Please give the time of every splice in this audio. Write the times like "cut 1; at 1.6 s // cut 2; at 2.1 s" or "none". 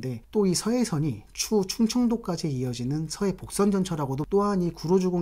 cut 1; at 4.2 s

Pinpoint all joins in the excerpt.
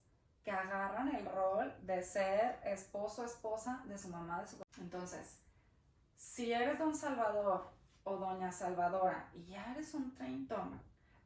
cut 1; at 4.6 s

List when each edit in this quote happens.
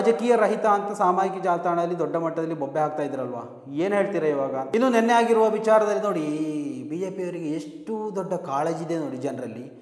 cut 1; at 4.7 s

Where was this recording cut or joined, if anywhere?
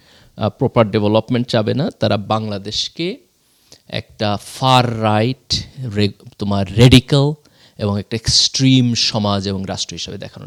none

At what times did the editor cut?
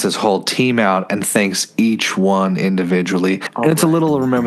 cut 1; at 3.5 s

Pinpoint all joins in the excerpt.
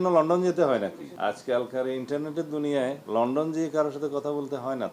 cut 1; at 1.0 s // cut 2; at 3.0 s

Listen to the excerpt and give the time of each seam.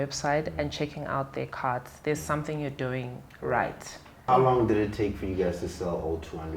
cut 1; at 4.1 s

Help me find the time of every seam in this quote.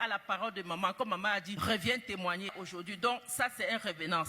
cut 1; at 1.5 s // cut 2; at 2.6 s

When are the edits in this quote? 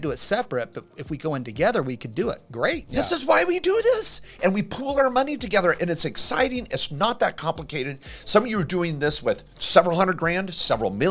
cut 1; at 2.9 s // cut 2; at 9.5 s

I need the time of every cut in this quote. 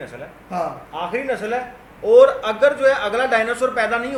none

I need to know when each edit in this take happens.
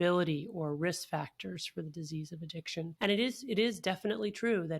cut 1; at 2.9 s

